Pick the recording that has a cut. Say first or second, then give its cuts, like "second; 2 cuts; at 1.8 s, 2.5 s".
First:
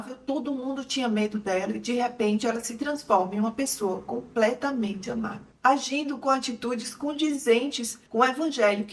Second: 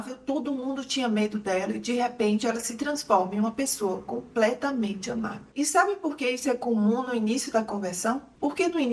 first; 1 cut; at 5.4 s